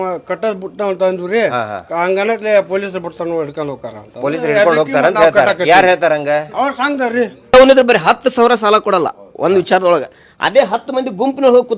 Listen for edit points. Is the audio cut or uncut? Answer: cut